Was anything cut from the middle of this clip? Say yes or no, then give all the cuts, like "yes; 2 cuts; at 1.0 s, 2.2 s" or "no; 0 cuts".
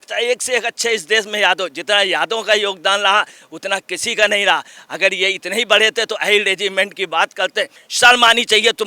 yes; 1 cut; at 7.8 s